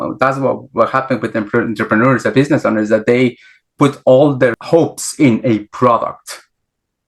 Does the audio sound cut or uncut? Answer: cut